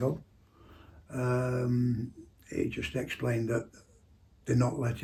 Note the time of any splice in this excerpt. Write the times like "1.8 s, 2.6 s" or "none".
none